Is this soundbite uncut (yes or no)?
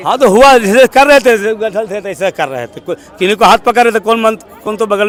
yes